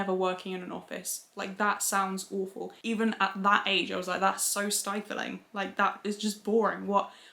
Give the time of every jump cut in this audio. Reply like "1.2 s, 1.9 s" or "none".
2.7 s